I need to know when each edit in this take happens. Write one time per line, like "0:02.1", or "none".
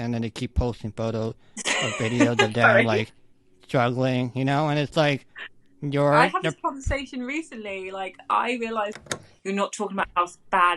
0:09.1

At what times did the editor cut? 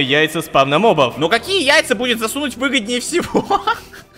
0:01.1

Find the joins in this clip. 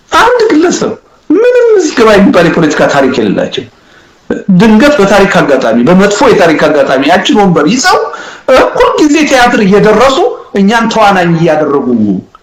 none

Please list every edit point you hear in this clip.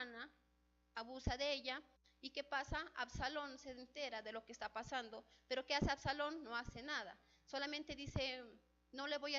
0:07.4

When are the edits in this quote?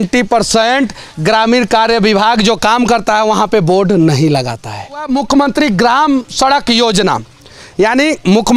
0:05.1

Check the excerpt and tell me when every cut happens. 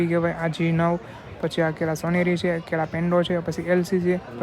none

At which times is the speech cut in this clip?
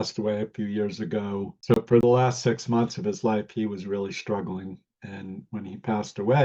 0:01.5

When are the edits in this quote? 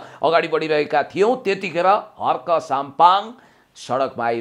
none

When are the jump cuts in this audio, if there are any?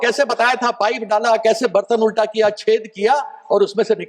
none

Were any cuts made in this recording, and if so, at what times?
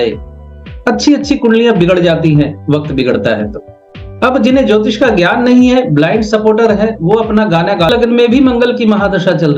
0:07.9

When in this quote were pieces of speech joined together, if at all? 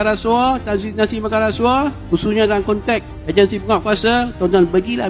none

